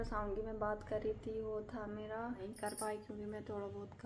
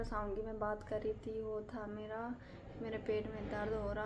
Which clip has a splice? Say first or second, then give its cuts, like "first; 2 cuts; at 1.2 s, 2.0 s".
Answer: first; 1 cut; at 2.5 s